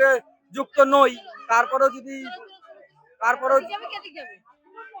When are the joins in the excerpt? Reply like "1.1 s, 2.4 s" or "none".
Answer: none